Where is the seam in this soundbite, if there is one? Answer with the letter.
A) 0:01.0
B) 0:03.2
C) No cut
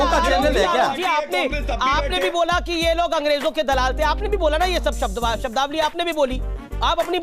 A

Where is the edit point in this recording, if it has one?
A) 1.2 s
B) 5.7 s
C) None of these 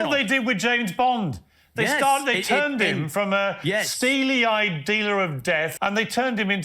B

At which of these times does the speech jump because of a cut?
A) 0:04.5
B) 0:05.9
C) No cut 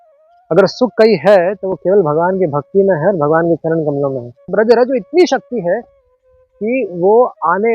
A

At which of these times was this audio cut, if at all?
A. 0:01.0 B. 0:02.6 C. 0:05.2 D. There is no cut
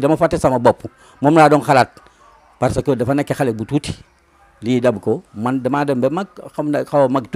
D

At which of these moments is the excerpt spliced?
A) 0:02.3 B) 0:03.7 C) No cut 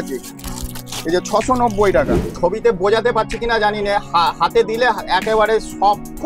A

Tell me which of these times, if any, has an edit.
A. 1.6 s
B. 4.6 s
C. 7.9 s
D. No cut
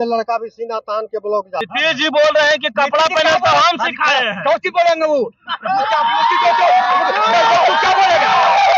A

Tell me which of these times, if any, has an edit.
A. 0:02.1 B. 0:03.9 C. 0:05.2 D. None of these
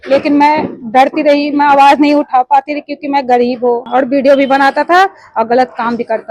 B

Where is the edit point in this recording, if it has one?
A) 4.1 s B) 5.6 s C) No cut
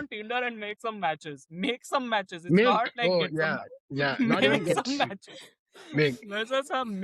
C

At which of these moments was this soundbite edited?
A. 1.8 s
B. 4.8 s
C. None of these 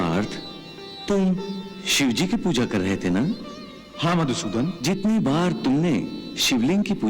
B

